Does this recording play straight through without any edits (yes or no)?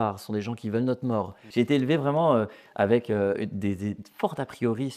no